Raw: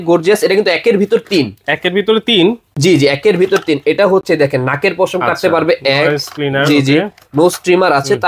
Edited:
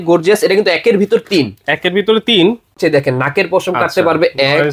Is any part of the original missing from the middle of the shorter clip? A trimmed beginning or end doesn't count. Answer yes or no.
yes